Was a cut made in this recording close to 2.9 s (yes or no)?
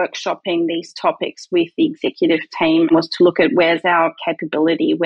yes